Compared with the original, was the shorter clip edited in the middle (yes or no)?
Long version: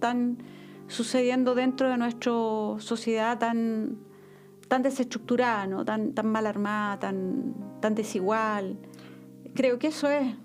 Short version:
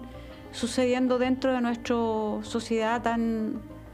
no